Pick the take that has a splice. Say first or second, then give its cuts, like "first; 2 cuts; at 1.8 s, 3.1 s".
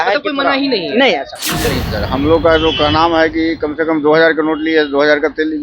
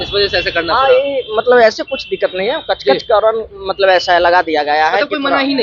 first; 1 cut; at 1.9 s